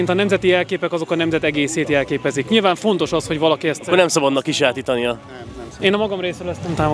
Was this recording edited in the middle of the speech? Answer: no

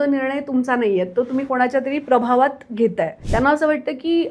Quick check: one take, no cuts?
no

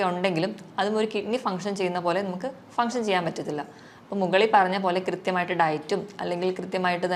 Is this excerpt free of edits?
yes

